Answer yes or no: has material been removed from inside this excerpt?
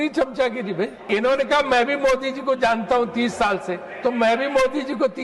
yes